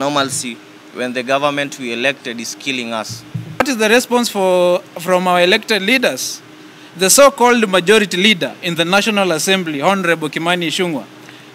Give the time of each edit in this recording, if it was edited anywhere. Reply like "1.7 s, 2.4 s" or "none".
3.6 s